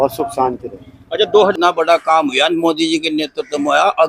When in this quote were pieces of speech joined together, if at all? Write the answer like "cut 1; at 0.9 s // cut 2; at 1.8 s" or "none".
cut 1; at 1.5 s